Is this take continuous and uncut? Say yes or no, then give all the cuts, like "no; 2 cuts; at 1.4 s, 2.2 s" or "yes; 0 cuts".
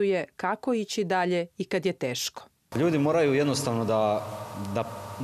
yes; 0 cuts